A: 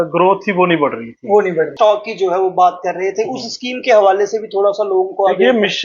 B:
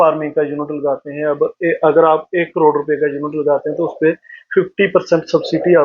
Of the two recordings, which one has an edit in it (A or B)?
A